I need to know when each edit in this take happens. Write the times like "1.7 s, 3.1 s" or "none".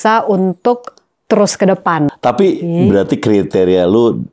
2.1 s